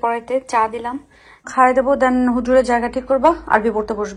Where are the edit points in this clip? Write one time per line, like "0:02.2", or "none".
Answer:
0:01.5